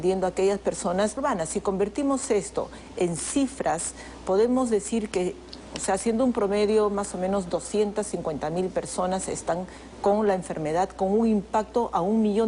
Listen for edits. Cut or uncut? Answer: uncut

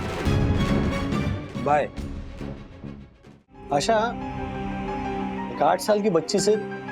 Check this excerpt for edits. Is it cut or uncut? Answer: cut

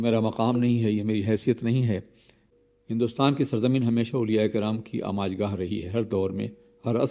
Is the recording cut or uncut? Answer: cut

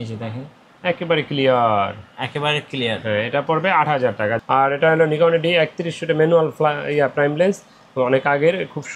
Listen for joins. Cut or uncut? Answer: cut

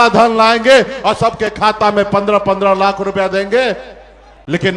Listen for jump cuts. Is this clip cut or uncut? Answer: uncut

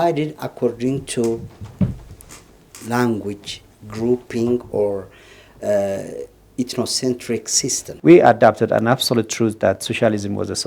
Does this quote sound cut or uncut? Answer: cut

